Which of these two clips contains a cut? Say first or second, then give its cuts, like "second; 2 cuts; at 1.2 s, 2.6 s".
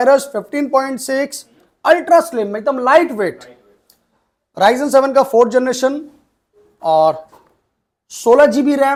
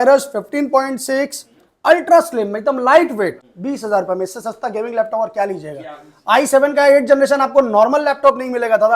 second; 1 cut; at 3.5 s